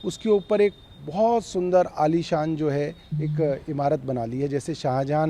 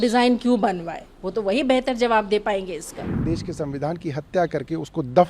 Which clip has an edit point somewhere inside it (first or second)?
second